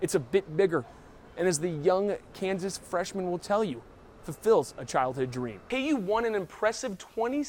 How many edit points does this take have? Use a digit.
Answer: 1